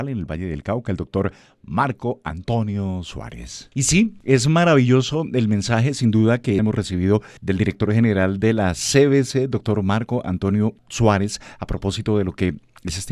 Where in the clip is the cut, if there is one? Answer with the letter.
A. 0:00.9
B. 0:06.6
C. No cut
B